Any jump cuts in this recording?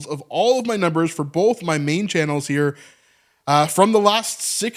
no; 0 cuts

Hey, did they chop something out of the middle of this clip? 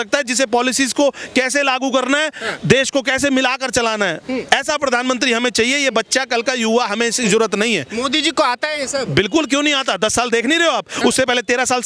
no; 0 cuts

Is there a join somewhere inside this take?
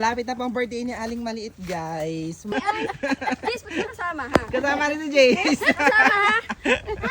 yes; 1 cut; at 2.5 s

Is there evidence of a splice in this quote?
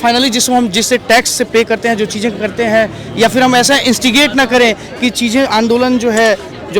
no; 0 cuts

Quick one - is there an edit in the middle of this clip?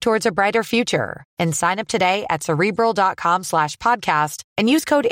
no; 0 cuts

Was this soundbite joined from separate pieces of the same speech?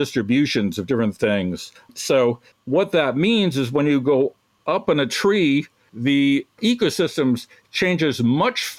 no; 0 cuts

